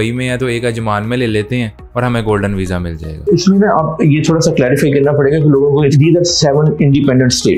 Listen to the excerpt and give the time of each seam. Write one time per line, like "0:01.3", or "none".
none